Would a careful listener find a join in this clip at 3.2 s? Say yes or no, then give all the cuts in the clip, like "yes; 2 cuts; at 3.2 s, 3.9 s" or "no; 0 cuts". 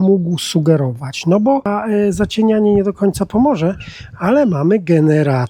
no; 1 cut; at 1.6 s